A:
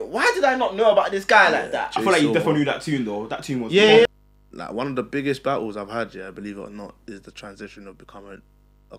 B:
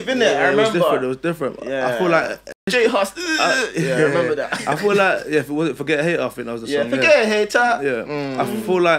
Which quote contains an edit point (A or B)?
A